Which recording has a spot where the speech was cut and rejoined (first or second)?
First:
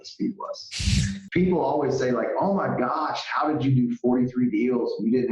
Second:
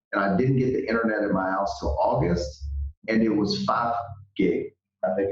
first